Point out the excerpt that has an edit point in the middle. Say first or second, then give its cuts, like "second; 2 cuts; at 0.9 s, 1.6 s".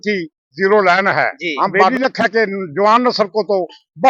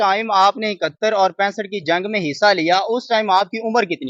first; 1 cut; at 1.9 s